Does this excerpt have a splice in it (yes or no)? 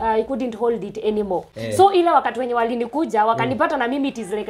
no